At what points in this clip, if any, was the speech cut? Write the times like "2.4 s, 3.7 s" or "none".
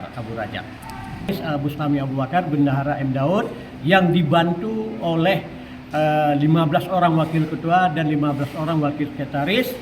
1.3 s